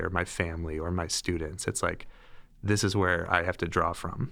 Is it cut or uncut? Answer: uncut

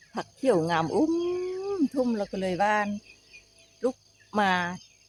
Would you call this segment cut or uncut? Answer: uncut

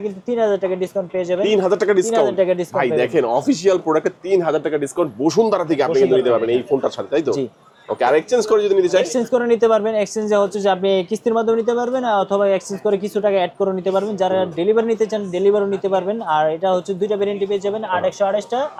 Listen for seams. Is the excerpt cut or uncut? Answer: uncut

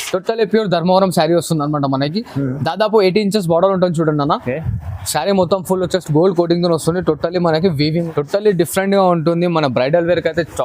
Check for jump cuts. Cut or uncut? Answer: cut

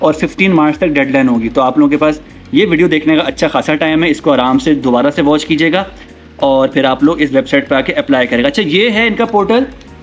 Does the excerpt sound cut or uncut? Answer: uncut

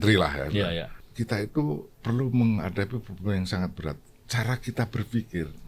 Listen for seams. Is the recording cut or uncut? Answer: cut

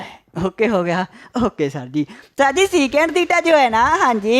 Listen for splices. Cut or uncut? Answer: cut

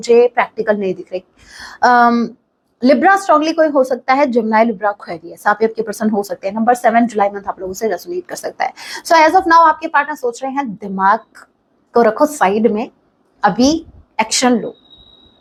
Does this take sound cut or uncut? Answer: uncut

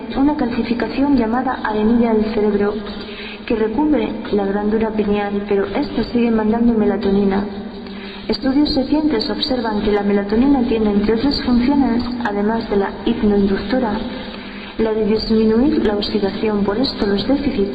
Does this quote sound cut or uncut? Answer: cut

